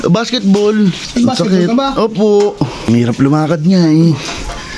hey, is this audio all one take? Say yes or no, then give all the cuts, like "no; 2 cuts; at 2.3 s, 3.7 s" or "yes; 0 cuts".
no; 2 cuts; at 1.0 s, 2.9 s